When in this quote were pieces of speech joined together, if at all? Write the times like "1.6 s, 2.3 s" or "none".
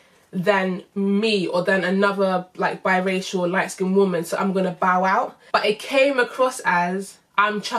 5.4 s

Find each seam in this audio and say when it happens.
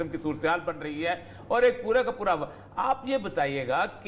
none

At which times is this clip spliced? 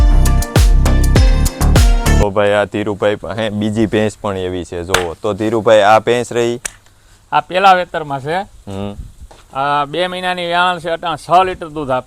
none

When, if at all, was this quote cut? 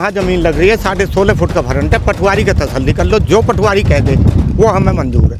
none

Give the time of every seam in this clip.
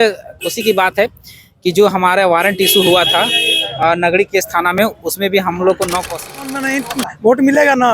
6.6 s

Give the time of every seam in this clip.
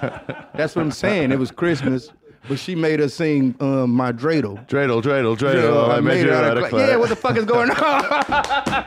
4.6 s

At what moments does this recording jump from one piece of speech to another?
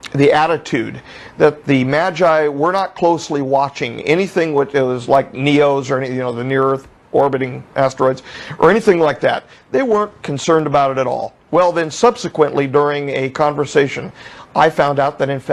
none

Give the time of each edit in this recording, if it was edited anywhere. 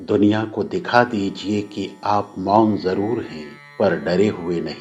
3.9 s

